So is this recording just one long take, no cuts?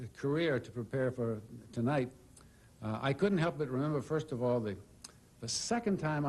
no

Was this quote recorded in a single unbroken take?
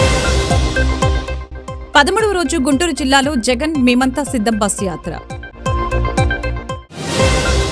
yes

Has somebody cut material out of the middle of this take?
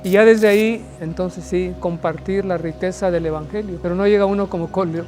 yes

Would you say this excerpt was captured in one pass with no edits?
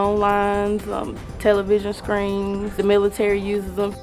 no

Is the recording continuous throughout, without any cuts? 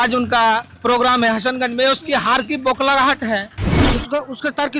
no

